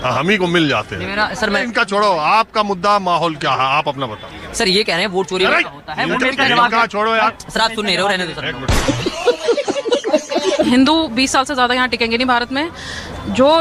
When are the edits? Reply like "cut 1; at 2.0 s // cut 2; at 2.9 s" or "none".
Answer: cut 1; at 1.6 s // cut 2; at 8.7 s // cut 3; at 10.7 s